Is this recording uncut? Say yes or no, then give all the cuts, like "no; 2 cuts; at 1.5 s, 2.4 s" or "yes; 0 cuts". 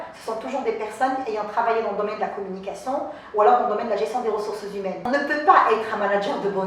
no; 1 cut; at 5.1 s